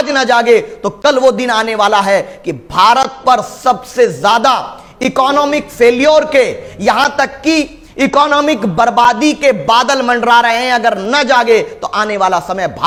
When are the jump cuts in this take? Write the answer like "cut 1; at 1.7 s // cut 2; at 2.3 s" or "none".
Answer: none